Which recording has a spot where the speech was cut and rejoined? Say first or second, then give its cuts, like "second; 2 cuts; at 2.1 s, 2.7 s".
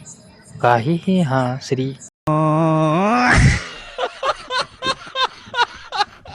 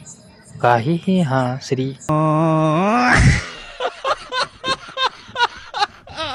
first; 1 cut; at 2.0 s